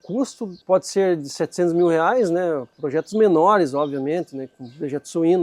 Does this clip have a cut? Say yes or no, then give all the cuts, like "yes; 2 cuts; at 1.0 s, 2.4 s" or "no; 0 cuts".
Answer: no; 0 cuts